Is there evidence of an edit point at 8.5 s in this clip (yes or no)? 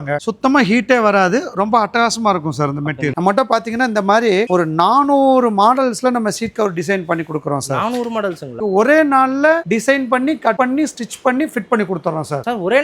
yes